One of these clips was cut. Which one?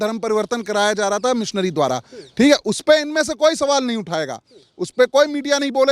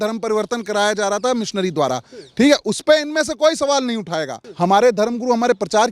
second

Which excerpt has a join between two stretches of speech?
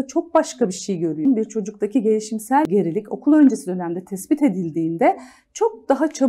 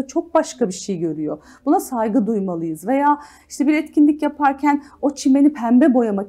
first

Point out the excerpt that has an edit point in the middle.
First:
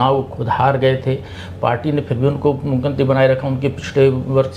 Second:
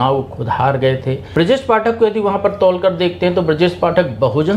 second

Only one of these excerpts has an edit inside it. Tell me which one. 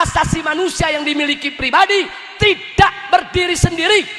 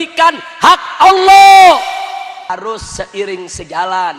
second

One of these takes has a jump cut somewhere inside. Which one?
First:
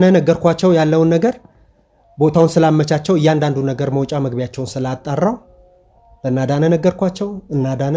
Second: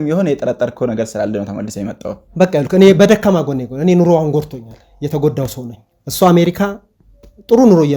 second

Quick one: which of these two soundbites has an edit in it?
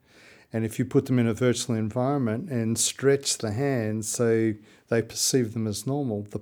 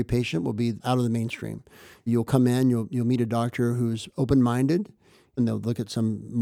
second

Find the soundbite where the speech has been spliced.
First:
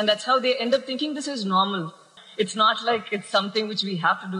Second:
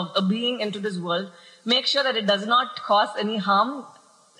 first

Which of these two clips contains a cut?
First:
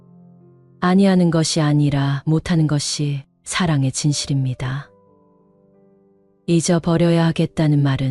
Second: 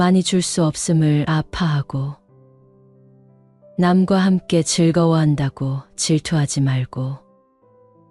second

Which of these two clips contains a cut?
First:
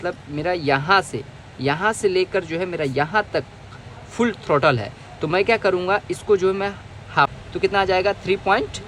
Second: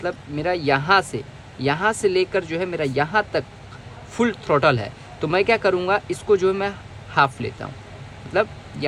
first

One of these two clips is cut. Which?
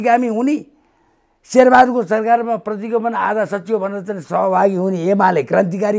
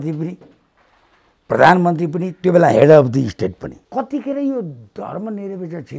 second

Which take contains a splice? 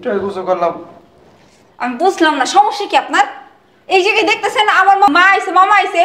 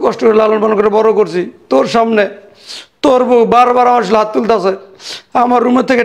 first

